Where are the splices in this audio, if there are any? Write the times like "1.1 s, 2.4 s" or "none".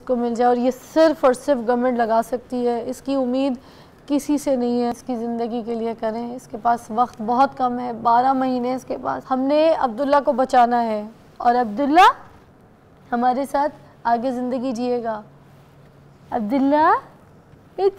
4.9 s, 9.1 s